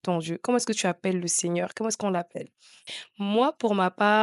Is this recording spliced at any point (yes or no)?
no